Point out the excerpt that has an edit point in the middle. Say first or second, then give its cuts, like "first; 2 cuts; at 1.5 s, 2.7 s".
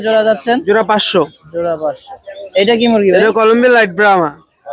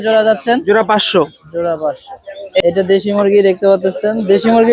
second; 1 cut; at 2.6 s